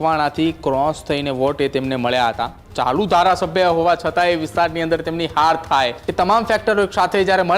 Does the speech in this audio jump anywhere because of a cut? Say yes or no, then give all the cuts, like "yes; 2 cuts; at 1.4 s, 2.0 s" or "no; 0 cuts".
yes; 2 cuts; at 2.6 s, 6.0 s